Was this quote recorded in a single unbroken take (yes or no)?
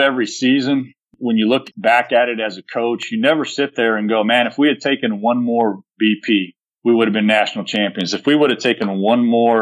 no